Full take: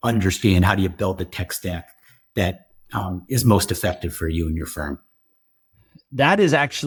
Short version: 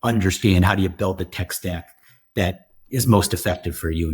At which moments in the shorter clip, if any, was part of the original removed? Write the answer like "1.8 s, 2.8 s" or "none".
2.8 s